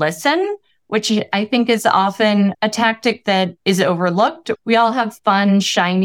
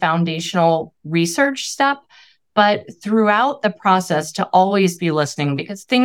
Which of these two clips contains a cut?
first; 3 cuts; at 2.5 s, 3.6 s, 4.5 s

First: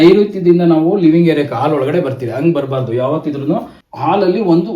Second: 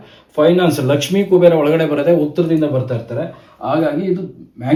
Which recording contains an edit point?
first; 1 cut; at 3.8 s

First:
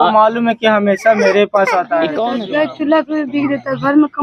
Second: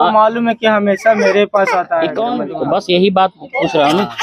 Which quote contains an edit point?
first; 1 cut; at 2.4 s

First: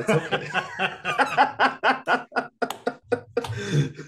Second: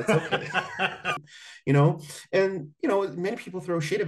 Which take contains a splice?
second; 1 cut; at 1.1 s

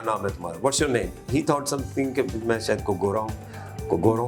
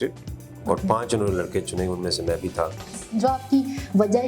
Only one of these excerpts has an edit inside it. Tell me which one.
second; 1 cut; at 3.0 s

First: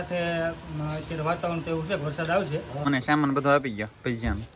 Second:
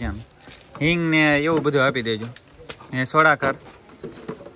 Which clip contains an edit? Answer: first; 1 cut; at 2.8 s

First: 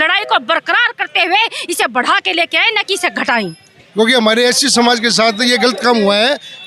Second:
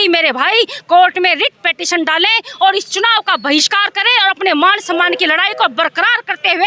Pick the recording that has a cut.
first; 1 cut; at 3.8 s

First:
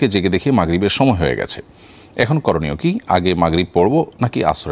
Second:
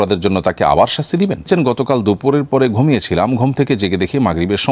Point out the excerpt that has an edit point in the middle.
second; 1 cut; at 1.4 s

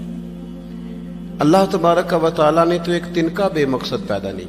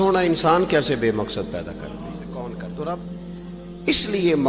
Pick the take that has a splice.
second; 1 cut; at 3.2 s

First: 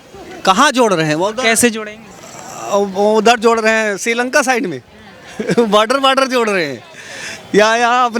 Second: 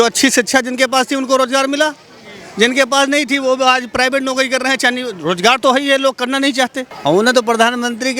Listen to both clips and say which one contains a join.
second; 1 cut; at 6.9 s

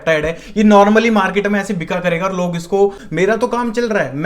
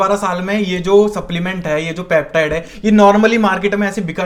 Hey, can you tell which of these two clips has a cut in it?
first; 1 cut; at 3.0 s

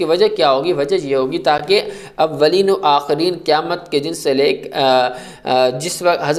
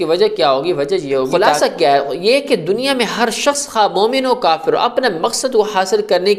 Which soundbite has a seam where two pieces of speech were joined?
second; 1 cut; at 1.3 s

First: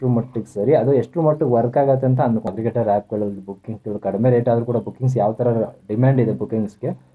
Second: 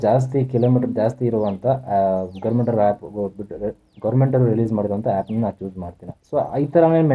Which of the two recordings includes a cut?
first; 1 cut; at 2.5 s

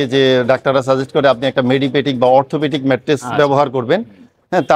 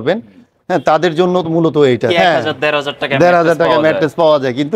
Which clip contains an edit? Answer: second; 1 cut; at 2.1 s

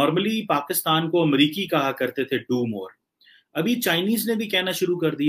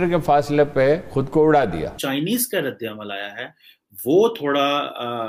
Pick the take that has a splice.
second; 1 cut; at 2.0 s

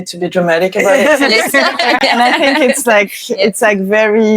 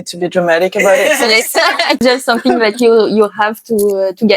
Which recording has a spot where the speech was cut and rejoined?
second; 1 cut; at 2.0 s

